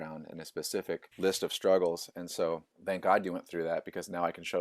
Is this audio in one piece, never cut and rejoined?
no; 2 cuts; at 1.1 s, 2.7 s

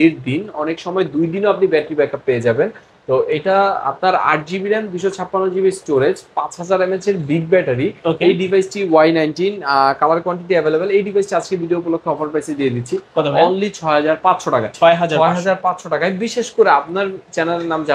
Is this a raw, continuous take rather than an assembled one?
yes; 0 cuts

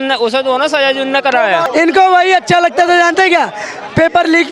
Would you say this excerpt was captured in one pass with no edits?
no; 1 cut; at 1.6 s

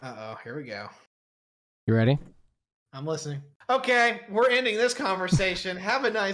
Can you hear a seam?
yes; 1 cut; at 3.5 s

